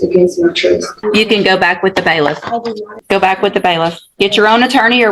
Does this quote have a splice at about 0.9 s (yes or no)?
yes